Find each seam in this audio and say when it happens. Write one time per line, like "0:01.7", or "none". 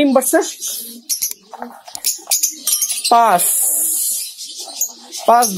none